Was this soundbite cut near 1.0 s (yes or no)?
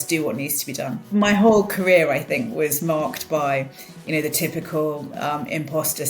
yes